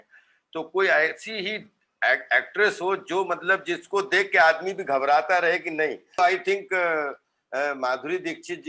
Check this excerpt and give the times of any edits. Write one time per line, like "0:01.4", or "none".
0:06.2